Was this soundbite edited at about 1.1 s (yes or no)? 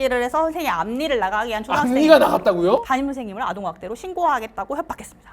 no